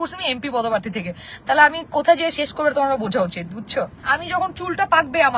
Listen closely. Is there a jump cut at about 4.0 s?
yes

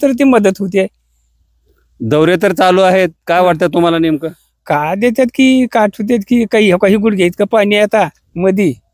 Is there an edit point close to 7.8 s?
no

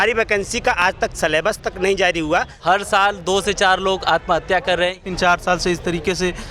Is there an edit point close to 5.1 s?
yes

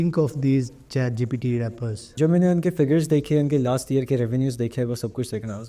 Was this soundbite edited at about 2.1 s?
yes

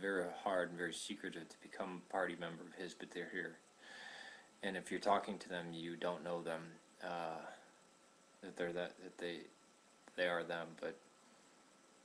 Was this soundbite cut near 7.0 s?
no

